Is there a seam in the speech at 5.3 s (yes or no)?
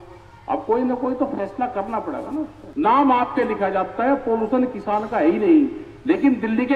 no